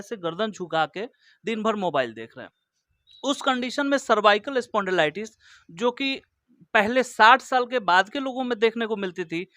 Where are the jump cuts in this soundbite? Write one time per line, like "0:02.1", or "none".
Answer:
none